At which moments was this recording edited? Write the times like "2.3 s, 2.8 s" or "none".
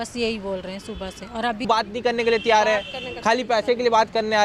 1.6 s